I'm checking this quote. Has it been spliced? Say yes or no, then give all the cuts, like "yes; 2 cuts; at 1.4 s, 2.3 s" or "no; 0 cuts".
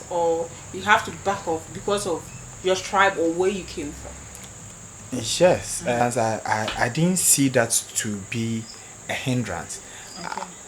yes; 1 cut; at 6.0 s